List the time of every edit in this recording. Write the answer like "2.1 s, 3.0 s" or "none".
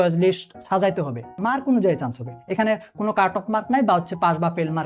1.4 s